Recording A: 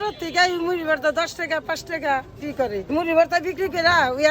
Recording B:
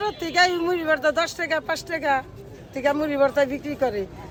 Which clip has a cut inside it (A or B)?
A